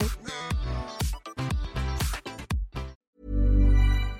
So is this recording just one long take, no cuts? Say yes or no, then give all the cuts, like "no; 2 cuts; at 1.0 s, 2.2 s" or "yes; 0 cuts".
no; 1 cut; at 3.0 s